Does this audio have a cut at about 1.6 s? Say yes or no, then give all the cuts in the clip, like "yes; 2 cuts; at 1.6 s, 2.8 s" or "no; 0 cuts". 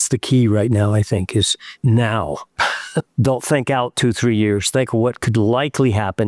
yes; 2 cuts; at 1.6 s, 2.6 s